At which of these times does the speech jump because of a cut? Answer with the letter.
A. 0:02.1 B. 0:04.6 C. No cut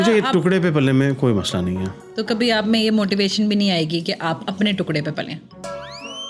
A